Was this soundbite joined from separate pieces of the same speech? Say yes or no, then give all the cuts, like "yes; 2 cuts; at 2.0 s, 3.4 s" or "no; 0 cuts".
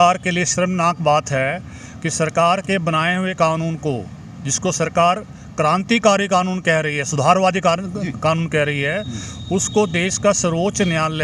no; 0 cuts